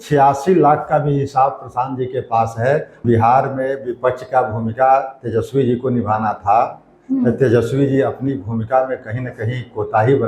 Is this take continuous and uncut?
no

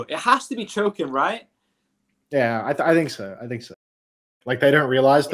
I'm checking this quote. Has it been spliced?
yes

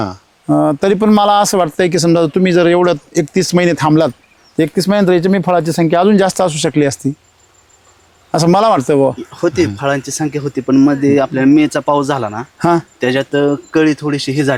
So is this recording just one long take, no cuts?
yes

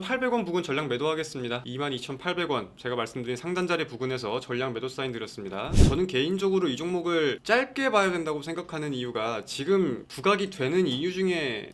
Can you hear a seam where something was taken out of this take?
yes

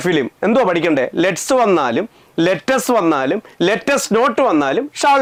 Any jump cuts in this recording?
no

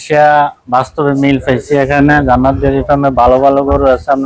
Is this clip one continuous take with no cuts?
yes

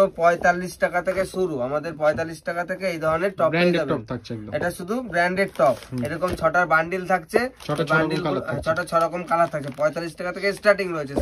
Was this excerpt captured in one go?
yes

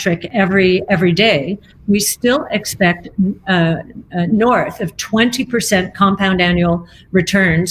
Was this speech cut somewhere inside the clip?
no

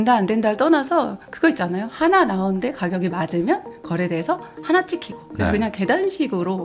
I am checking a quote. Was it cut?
no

